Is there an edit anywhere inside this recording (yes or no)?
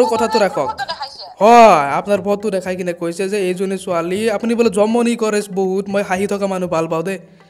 no